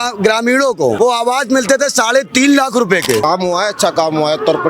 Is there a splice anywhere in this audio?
yes; 2 cuts; at 1.0 s, 3.2 s

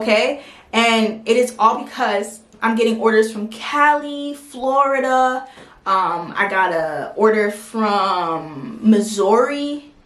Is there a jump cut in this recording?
yes; 1 cut; at 2.5 s

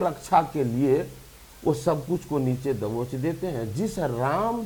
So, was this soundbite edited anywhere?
no; 0 cuts

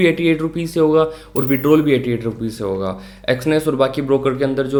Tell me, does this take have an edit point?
no; 0 cuts

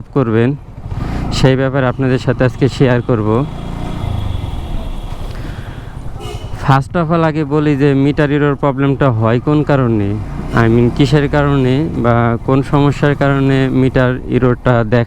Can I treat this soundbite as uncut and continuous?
yes; 0 cuts

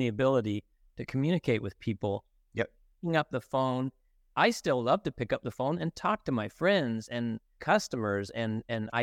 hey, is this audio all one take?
no; 1 cut; at 7.5 s

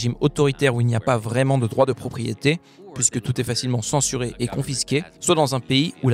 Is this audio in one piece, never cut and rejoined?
no; 1 cut; at 5.1 s

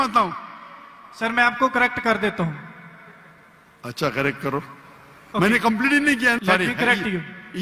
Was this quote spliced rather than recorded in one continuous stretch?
yes; 1 cut; at 6.4 s

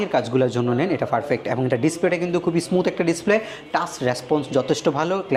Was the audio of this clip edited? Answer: no; 0 cuts

